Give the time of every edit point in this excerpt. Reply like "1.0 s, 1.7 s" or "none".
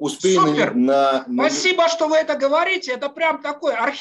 none

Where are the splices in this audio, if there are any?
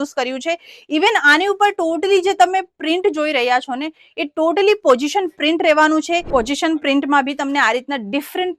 6.3 s

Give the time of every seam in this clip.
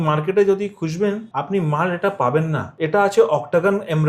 1.3 s, 2.7 s

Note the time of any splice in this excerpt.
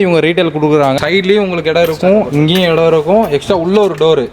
1.0 s

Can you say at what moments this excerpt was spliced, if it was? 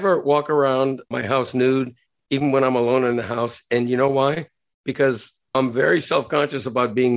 1.1 s

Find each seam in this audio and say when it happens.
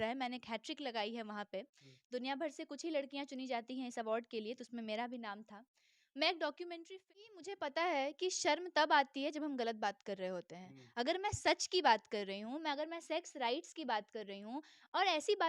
6.9 s

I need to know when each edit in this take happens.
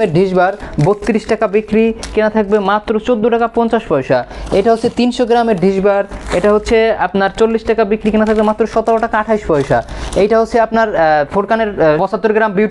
none

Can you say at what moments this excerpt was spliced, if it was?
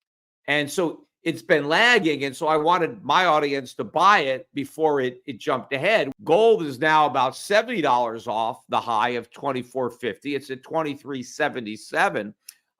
6.1 s

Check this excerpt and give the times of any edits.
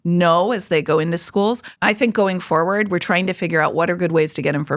1.7 s

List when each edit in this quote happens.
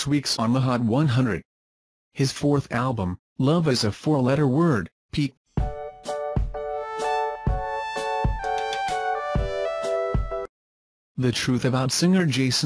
none

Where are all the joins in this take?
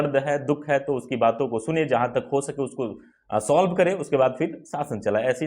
none

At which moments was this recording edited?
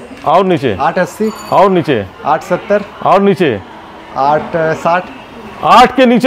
none

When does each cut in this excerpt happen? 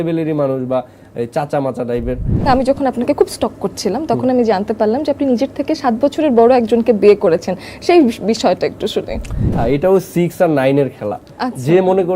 2.4 s, 9.5 s

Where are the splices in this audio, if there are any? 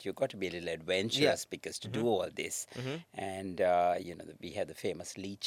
none

